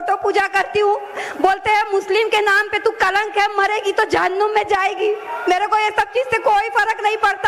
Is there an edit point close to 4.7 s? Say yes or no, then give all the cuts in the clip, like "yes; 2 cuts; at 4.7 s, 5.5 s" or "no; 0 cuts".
yes; 1 cut; at 4.7 s